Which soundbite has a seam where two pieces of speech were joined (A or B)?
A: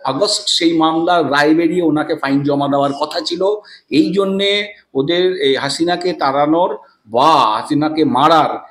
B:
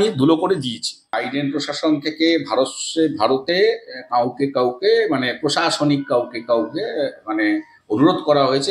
B